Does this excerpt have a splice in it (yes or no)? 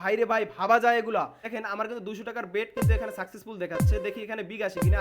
yes